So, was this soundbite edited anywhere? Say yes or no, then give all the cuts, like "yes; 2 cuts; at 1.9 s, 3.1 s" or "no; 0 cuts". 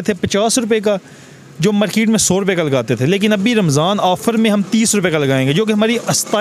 no; 0 cuts